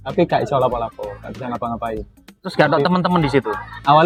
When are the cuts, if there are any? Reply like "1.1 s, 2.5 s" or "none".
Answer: none